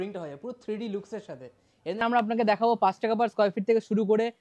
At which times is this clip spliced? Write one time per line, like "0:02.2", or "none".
0:02.0